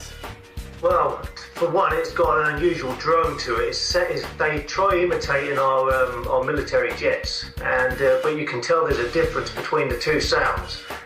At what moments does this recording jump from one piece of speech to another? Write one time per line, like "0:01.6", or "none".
0:01.5